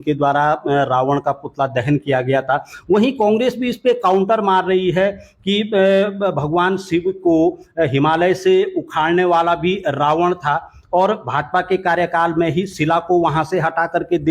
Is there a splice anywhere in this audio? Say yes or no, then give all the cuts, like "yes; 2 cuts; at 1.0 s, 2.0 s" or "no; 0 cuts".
no; 0 cuts